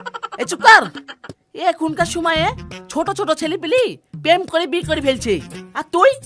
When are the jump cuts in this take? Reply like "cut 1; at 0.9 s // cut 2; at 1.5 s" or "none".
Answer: none